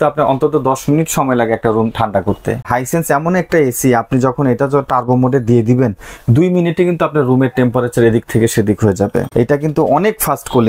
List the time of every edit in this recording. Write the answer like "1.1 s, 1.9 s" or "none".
2.7 s, 9.3 s